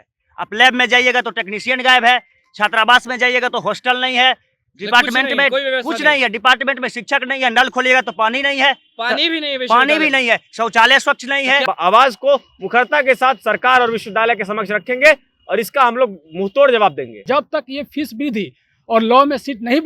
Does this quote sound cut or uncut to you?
cut